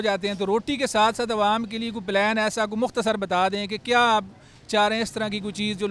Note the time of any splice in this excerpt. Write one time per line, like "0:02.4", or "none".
none